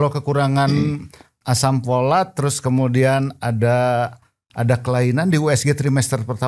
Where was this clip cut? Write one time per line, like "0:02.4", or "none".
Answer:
none